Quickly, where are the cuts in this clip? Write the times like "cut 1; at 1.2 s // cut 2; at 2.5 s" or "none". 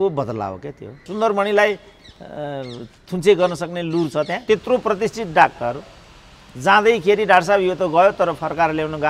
cut 1; at 1.0 s // cut 2; at 4.4 s